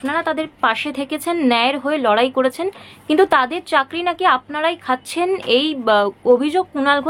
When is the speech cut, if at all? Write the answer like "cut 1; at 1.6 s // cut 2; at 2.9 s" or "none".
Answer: none